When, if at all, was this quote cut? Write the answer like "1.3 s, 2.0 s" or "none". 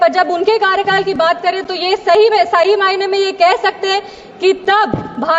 none